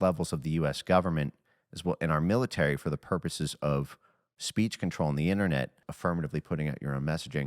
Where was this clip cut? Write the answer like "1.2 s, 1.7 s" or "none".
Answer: 5.8 s